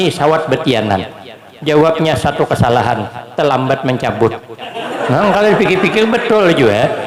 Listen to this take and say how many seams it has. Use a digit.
0